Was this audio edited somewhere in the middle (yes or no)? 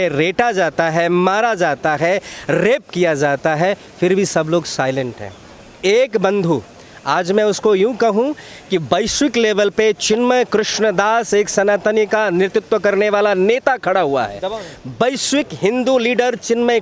no